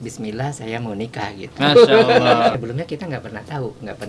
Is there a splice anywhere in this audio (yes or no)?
yes